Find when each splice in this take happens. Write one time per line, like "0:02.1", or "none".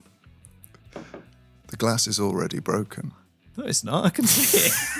none